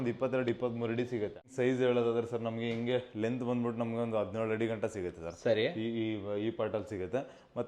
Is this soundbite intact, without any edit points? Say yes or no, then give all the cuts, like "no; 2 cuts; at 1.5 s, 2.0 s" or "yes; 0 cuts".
no; 1 cut; at 1.5 s